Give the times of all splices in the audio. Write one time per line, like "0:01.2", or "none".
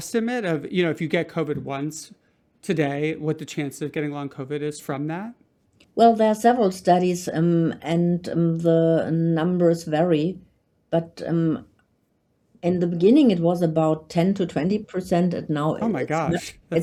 none